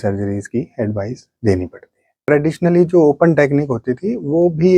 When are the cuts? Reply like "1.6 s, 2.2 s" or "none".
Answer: 2.2 s